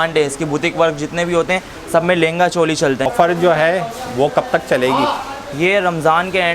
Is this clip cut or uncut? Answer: cut